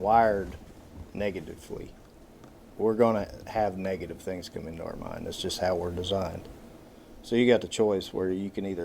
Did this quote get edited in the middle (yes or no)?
yes